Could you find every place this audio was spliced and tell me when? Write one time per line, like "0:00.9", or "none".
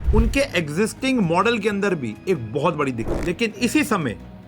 0:03.1